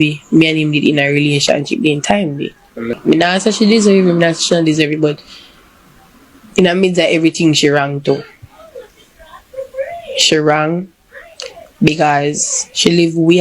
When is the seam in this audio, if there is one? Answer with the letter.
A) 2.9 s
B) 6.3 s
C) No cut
A